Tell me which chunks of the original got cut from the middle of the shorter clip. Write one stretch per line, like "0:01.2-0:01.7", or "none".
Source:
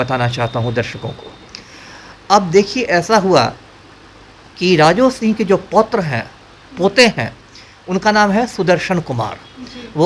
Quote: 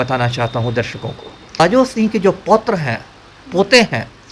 0:01.6-0:04.8